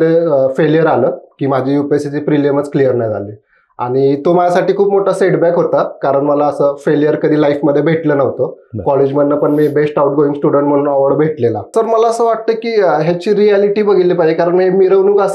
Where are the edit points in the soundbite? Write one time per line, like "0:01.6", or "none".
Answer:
0:11.7

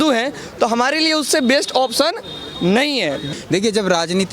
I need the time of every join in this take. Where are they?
0:03.2

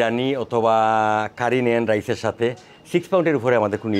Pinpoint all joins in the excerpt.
none

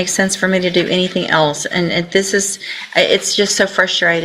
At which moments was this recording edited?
none

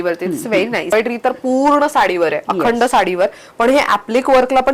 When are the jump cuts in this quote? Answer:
0:00.9

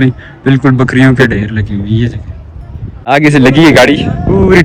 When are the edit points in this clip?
0:03.1

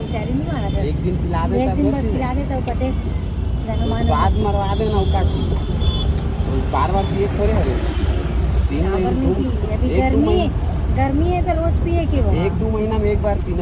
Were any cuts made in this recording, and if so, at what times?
none

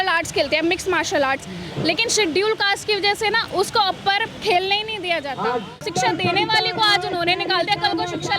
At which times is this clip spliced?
0:05.8

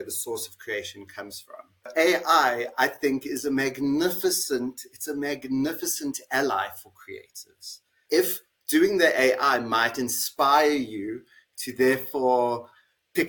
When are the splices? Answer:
0:01.9
0:08.0

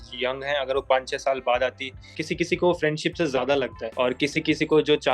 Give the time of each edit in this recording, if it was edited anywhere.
0:02.1
0:03.8

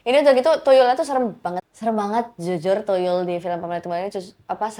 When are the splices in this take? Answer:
0:01.6

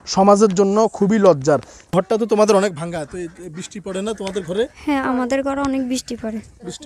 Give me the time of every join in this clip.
0:01.9

